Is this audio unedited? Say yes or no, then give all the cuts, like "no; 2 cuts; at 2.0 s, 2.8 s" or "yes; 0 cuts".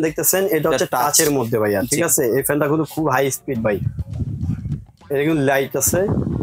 yes; 0 cuts